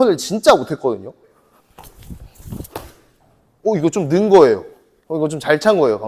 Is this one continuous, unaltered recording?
no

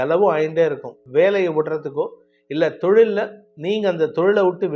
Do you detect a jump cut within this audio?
yes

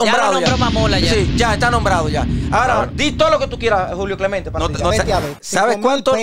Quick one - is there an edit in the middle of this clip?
yes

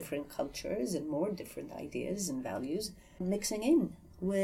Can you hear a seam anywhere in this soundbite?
yes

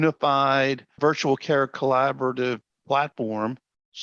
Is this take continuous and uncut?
yes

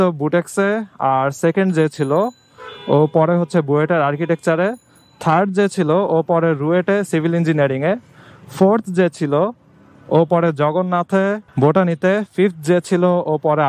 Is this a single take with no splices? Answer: yes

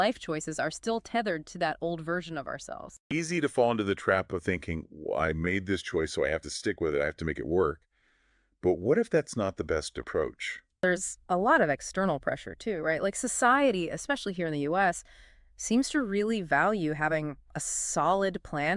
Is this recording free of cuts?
no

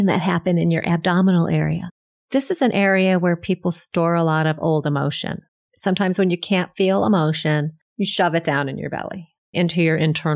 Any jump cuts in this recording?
yes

